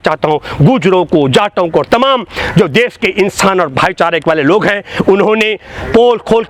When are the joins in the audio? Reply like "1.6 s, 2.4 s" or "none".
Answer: none